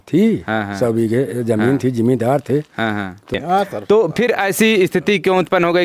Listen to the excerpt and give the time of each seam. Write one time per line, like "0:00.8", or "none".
0:03.3

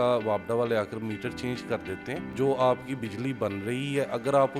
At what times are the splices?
0:02.3

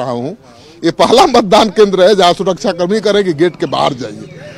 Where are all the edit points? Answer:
none

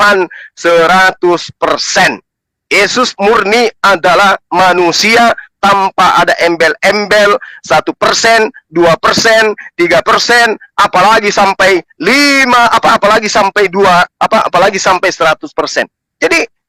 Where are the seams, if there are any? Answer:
none

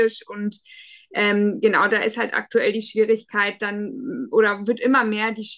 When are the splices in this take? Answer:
none

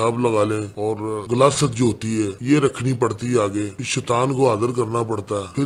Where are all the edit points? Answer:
none

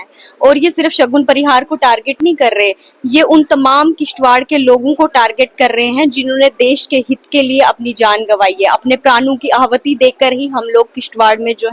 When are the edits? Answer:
none

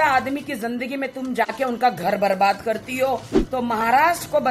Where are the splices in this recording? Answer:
0:03.4

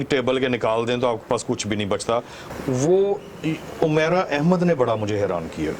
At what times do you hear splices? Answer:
0:02.4

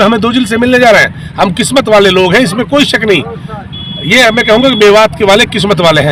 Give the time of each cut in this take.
none

